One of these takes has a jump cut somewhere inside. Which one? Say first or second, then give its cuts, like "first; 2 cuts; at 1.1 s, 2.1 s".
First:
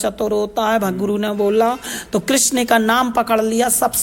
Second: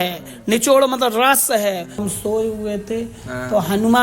second; 1 cut; at 2.0 s